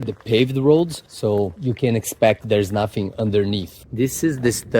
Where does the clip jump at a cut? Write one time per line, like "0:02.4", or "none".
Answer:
0:03.8